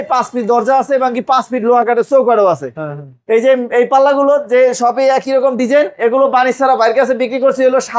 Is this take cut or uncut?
uncut